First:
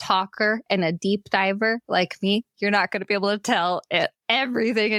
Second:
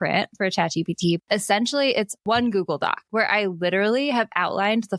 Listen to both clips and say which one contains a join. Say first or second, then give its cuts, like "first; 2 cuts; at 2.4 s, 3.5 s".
second; 3 cuts; at 1.2 s, 2.2 s, 3.1 s